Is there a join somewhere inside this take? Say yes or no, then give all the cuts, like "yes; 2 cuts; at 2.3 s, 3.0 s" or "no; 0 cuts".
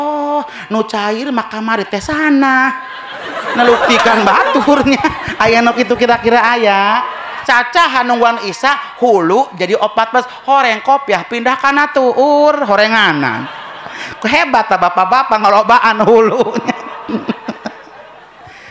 yes; 1 cut; at 7.4 s